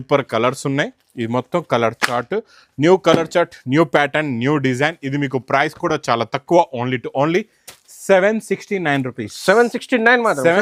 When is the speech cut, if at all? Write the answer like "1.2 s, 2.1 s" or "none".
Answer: none